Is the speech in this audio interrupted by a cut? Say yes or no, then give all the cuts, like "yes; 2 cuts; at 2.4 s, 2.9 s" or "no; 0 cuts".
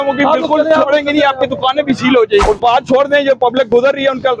yes; 1 cut; at 2.4 s